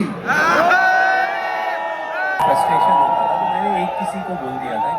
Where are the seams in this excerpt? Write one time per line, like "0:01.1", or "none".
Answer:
0:02.3